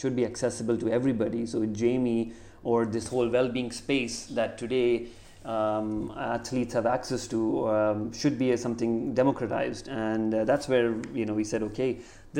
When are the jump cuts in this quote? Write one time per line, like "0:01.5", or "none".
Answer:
none